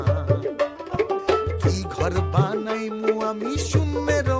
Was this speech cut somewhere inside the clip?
no; 0 cuts

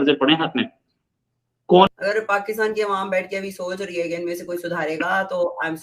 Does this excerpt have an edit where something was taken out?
yes; 1 cut; at 1.9 s

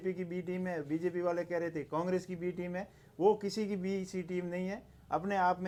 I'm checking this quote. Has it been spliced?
no; 0 cuts

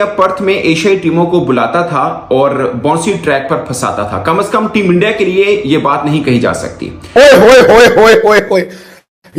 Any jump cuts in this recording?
yes; 1 cut; at 7.0 s

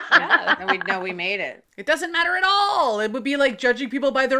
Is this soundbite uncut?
no; 1 cut; at 1.7 s

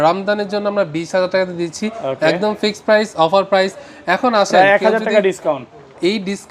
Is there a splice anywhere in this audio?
no; 0 cuts

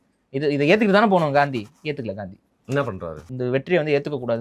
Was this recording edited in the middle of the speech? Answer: yes; 1 cut; at 3.3 s

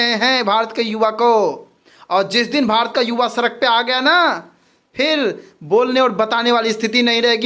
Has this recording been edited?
no; 0 cuts

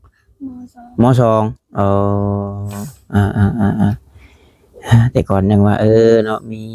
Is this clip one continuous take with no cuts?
yes; 0 cuts

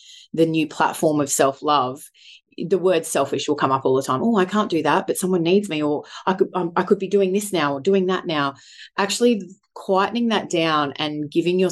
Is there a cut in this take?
yes; 1 cut; at 2.3 s

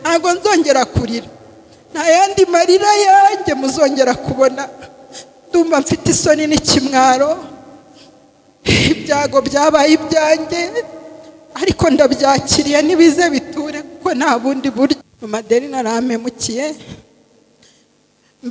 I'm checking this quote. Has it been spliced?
yes; 1 cut; at 15.1 s

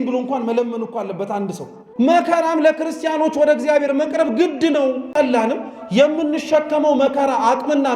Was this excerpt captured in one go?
no; 2 cuts; at 1.9 s, 5.1 s

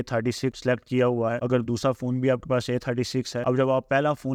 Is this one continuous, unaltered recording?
yes; 0 cuts

